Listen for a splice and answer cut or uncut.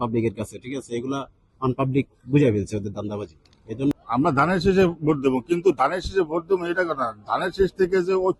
cut